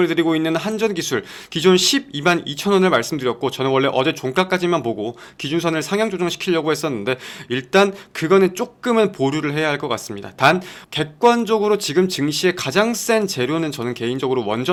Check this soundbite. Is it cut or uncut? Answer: uncut